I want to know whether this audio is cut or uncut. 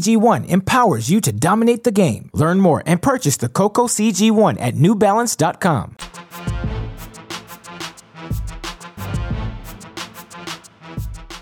uncut